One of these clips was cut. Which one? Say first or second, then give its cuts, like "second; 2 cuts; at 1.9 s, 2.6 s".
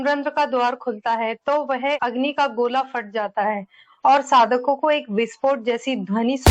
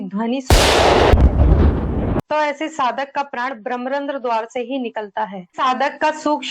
second; 2 cuts; at 2.2 s, 5.5 s